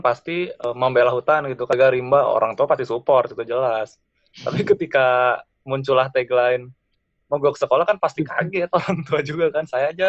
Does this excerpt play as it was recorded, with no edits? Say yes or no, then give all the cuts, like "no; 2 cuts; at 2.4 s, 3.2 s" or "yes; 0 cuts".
yes; 0 cuts